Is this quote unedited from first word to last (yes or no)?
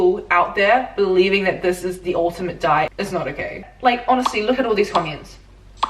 no